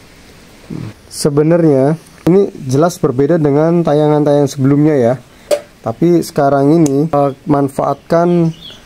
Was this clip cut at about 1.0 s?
yes; 4 cuts; at 1.0 s, 2.3 s, 5.4 s, 7.1 s

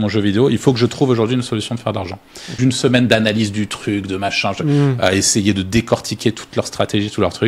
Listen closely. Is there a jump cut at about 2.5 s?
yes; 1 cut; at 2.5 s

